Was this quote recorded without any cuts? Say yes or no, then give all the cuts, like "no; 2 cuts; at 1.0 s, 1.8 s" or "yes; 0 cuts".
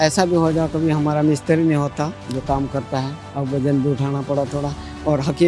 no; 2 cuts; at 2.2 s, 3.2 s